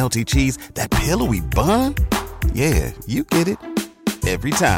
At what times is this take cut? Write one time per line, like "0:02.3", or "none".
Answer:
none

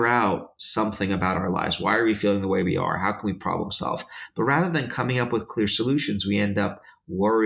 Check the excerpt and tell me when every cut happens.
none

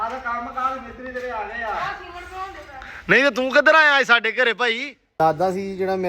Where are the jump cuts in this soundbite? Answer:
0:05.1

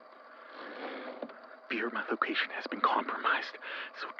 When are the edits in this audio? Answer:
0:01.6

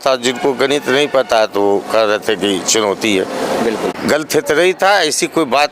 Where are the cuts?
0:03.9

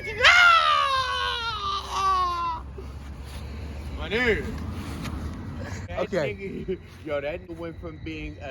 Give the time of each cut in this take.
0:05.9
0:07.5

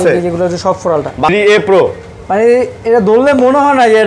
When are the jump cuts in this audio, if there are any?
0:01.3

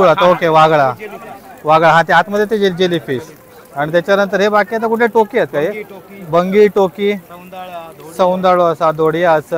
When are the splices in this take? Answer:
none

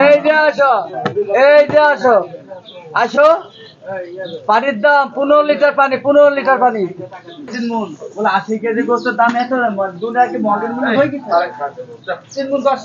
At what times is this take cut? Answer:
0:07.5

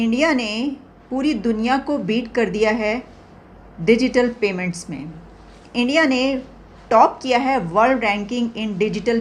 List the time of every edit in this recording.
none

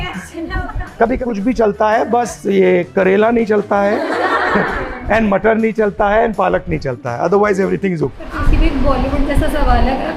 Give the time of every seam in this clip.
0:01.2
0:08.2

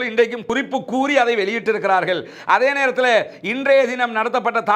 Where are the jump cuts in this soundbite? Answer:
none

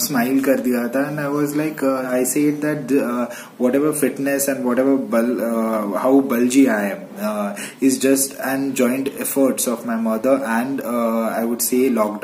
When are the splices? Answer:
0:02.0

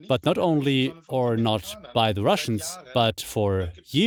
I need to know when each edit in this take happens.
none

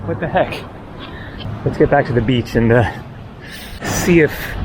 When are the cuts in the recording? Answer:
0:01.4
0:03.8

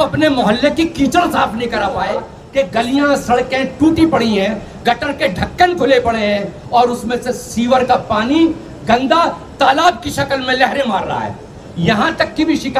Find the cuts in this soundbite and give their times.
0:02.3

